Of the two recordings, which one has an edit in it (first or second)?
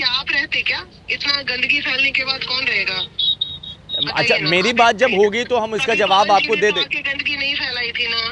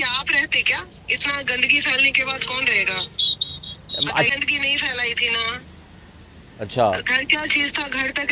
second